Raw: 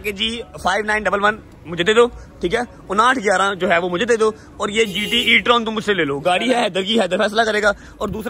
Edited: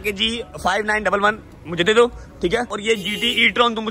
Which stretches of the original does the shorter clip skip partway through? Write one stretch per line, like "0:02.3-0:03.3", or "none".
0:02.7-0:04.6

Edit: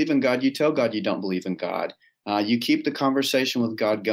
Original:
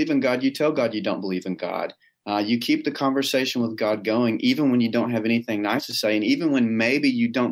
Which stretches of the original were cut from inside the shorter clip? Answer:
none

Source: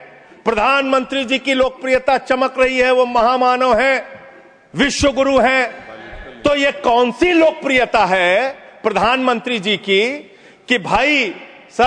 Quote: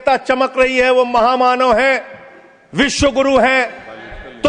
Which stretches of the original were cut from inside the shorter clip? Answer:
none

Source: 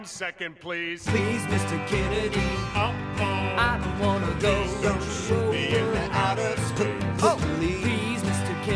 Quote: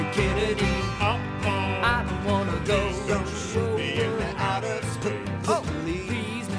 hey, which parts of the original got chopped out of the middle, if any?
none

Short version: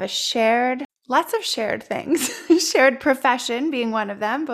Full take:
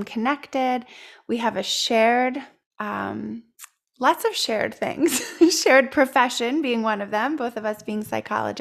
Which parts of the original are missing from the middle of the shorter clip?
0:02.5-0:03.8

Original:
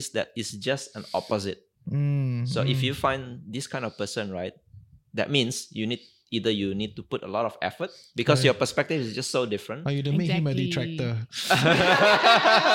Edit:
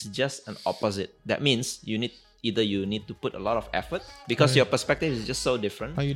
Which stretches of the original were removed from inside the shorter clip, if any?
0:01.6-0:05.0

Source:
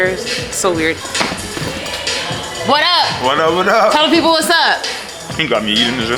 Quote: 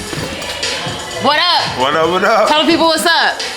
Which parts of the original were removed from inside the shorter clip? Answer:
none

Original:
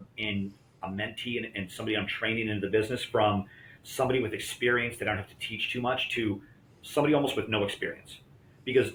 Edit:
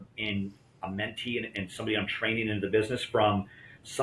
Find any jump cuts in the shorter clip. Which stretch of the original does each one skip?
none

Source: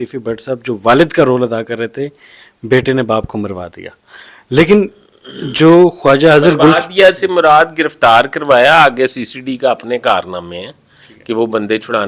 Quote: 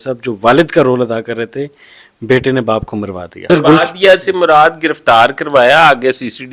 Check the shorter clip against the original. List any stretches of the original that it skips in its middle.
0:03.9-0:06.4

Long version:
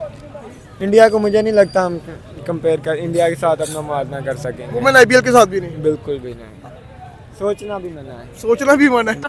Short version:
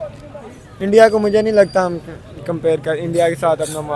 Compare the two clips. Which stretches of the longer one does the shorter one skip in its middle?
none

